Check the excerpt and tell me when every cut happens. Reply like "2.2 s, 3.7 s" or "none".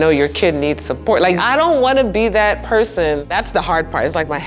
1.4 s, 3.2 s